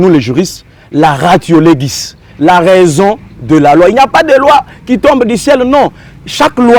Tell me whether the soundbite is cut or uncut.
uncut